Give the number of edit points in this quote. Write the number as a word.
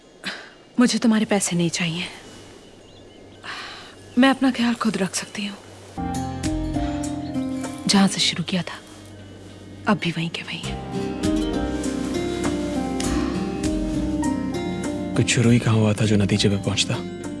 one